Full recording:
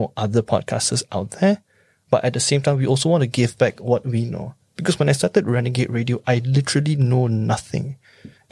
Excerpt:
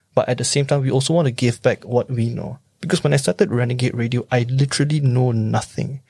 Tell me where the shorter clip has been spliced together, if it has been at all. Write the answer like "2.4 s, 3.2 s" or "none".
none